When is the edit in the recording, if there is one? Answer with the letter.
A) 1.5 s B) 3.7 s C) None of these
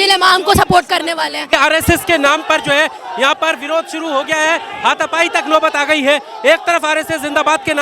A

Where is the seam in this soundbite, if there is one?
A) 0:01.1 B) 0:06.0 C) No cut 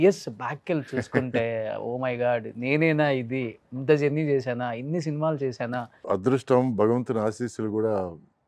B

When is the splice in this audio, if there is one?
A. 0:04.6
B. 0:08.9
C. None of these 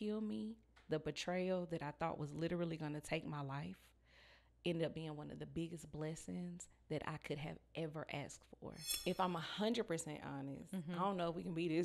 B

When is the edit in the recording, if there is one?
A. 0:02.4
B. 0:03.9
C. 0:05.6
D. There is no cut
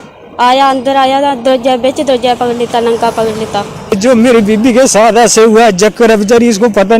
B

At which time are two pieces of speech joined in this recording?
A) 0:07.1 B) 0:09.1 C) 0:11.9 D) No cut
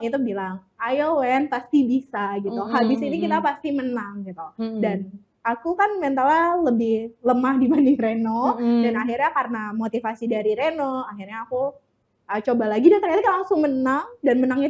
D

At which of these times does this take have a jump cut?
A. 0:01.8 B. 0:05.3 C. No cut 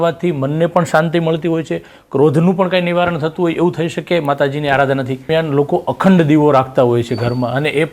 B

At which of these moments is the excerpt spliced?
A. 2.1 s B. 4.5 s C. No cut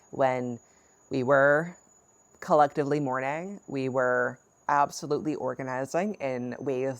B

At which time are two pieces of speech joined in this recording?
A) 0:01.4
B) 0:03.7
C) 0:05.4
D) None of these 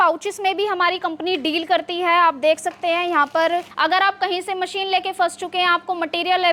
B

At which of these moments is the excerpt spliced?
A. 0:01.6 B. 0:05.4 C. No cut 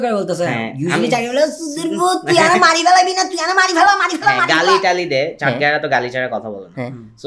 C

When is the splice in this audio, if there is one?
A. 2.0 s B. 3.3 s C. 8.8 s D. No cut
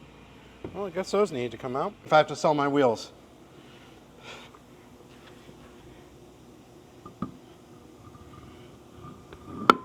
A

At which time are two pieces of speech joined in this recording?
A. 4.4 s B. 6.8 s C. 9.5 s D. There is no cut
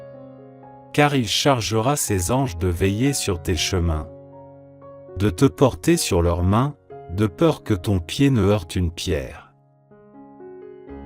C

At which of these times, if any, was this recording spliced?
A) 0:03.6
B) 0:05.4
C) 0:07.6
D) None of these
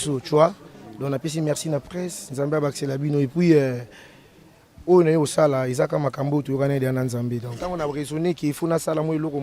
C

